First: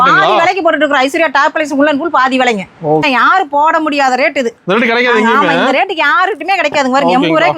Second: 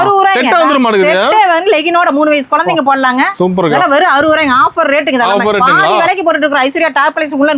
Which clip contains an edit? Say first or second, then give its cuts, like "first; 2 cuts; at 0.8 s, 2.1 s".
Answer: first; 1 cut; at 3.0 s